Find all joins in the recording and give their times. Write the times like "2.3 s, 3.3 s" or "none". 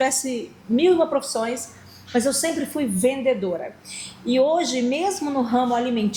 none

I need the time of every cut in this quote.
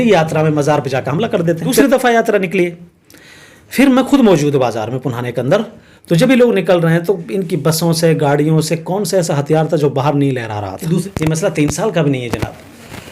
1.8 s, 11.0 s

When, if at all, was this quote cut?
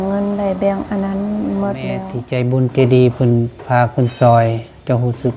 2.2 s

